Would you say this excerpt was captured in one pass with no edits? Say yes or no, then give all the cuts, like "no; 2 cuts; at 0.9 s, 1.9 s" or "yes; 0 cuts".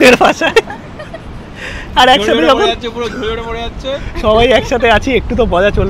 yes; 0 cuts